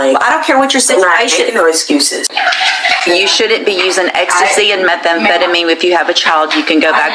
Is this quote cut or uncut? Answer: cut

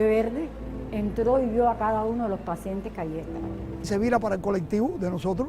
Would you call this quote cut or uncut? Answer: cut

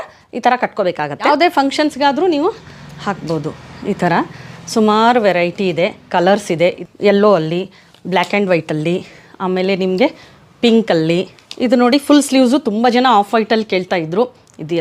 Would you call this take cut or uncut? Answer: cut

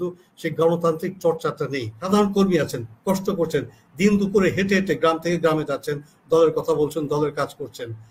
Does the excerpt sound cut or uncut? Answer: cut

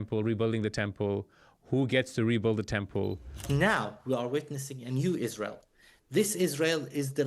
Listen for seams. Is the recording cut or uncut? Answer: cut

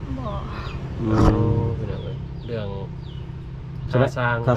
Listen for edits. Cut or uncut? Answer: uncut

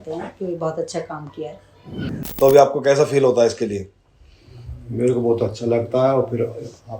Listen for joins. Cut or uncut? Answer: cut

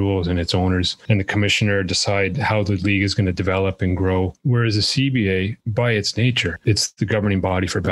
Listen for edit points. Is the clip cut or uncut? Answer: cut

